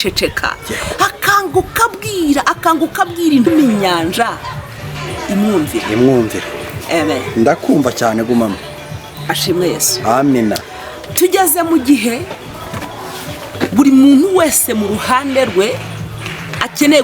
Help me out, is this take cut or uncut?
cut